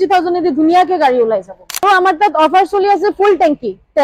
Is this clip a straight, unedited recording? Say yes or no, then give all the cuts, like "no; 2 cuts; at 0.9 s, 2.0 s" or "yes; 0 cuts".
no; 1 cut; at 1.8 s